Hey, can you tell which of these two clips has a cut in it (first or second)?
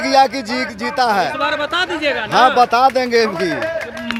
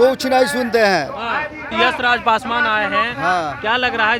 second